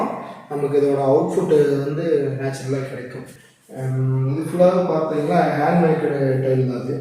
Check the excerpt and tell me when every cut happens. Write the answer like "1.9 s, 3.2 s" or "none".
3.2 s